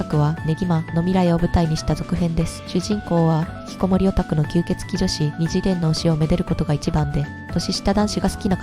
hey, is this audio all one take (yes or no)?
no